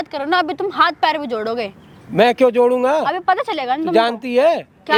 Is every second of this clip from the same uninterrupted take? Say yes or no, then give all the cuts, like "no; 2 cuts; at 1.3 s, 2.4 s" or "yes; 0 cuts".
yes; 0 cuts